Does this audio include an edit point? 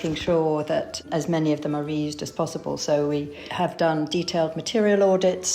yes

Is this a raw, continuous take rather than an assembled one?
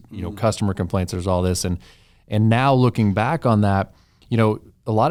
yes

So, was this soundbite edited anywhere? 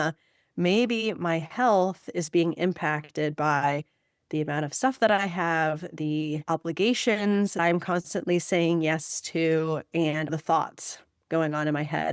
yes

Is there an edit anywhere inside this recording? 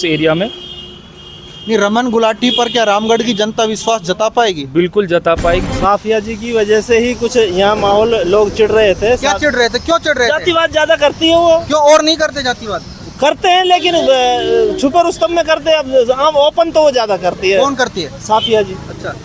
yes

